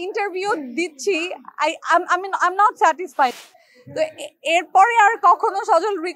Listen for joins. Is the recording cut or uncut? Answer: cut